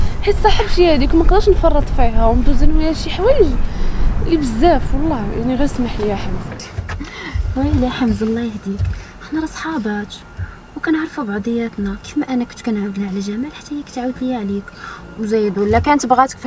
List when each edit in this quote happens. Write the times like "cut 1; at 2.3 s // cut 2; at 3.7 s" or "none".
cut 1; at 6.5 s